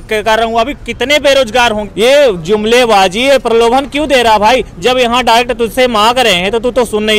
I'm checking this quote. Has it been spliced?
yes; 1 cut; at 1.8 s

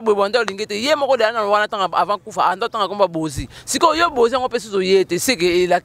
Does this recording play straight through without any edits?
yes; 0 cuts

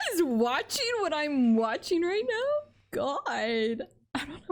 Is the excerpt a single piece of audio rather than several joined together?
yes; 0 cuts

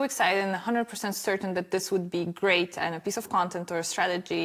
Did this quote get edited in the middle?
no; 0 cuts

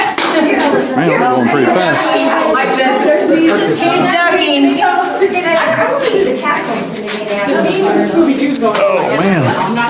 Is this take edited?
no; 0 cuts

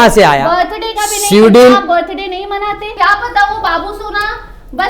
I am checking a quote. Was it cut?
yes; 1 cut; at 2.9 s

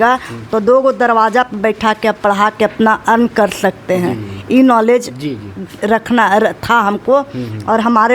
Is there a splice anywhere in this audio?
no; 0 cuts

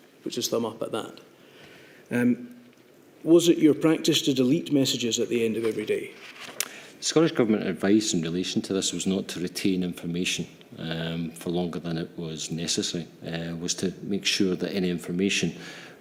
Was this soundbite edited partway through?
no; 0 cuts

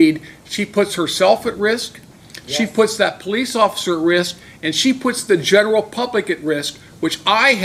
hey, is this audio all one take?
yes; 0 cuts

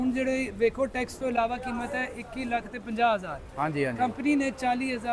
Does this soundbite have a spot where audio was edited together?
no; 0 cuts

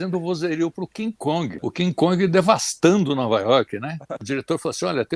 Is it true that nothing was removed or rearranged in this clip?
no; 2 cuts; at 1.5 s, 4.2 s

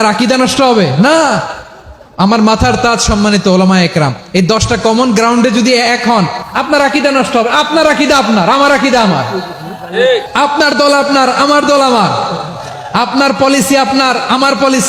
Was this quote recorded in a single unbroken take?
yes; 0 cuts

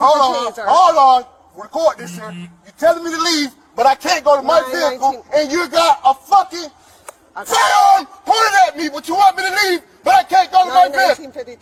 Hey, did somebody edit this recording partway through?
no; 0 cuts

